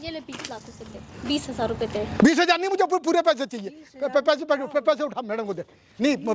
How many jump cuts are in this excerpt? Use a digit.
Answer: 0